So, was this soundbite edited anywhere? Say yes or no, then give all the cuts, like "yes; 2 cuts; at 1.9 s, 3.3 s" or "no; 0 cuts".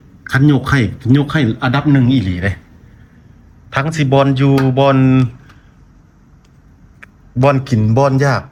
no; 0 cuts